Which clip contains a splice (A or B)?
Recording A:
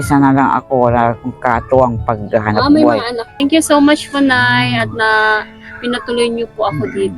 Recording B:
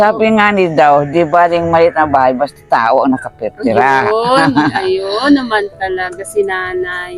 A